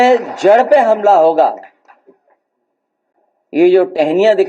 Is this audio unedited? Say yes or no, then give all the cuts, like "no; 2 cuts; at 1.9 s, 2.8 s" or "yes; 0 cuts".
yes; 0 cuts